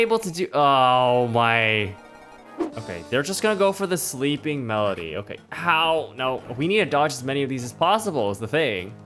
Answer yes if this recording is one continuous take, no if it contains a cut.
no